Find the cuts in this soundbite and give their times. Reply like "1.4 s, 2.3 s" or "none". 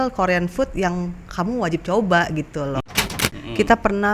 3.0 s